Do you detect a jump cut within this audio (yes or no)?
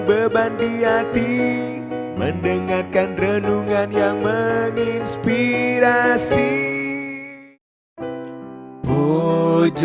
yes